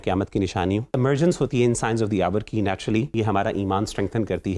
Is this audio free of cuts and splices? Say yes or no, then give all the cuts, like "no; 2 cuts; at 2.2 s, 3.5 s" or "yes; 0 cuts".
no; 2 cuts; at 0.9 s, 3.1 s